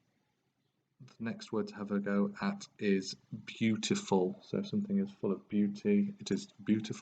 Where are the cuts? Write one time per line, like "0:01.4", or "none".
0:02.9